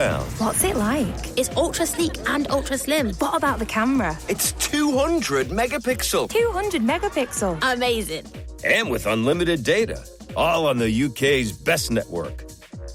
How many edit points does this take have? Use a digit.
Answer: 0